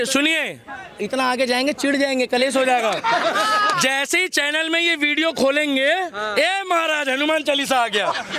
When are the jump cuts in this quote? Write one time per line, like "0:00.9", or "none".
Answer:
none